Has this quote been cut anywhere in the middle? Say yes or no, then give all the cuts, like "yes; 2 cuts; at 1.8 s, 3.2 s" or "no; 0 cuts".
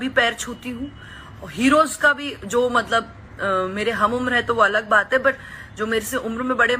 no; 0 cuts